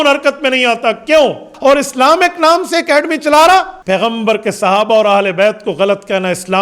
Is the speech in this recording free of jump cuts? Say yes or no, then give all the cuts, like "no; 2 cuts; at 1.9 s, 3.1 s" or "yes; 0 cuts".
no; 2 cuts; at 1.5 s, 3.8 s